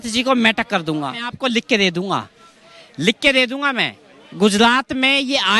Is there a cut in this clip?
yes; 1 cut; at 1.3 s

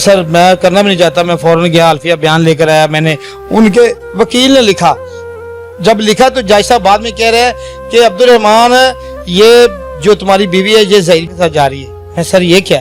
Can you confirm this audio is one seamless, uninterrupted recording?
no; 1 cut; at 11.3 s

